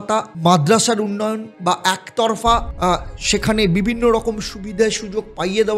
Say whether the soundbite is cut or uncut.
cut